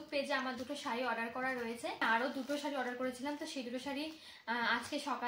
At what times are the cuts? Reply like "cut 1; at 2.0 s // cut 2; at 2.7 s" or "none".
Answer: cut 1; at 2.0 s